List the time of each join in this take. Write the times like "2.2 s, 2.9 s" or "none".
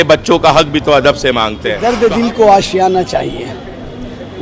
1.8 s

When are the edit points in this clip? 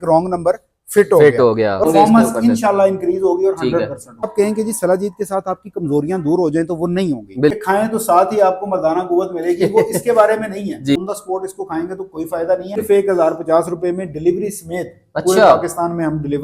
1.8 s, 4.3 s, 7.6 s, 11.0 s, 12.8 s

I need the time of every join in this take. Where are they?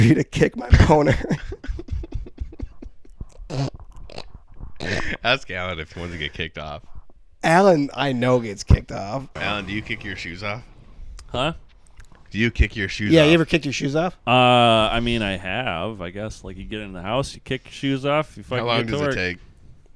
9.3 s

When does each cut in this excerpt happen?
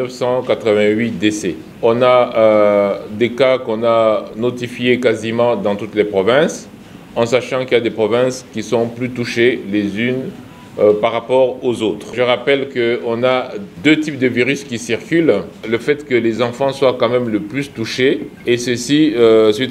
1.6 s, 12.1 s, 13.6 s, 15.5 s, 18.3 s

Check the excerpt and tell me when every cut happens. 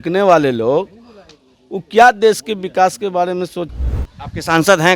3.7 s

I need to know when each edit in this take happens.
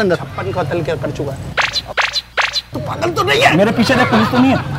2.7 s

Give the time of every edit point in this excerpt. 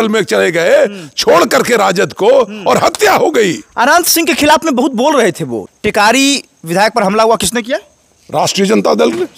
5.6 s

